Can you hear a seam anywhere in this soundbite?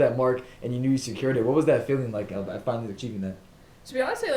no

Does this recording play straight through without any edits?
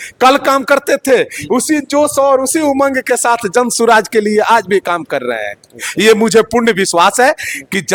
yes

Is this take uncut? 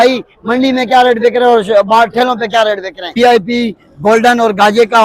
yes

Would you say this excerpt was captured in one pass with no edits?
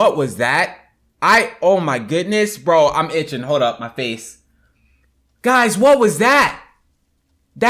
yes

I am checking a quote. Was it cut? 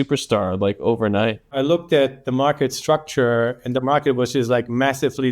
yes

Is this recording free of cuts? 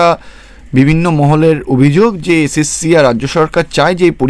yes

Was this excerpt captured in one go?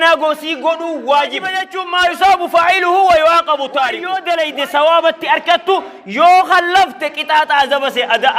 no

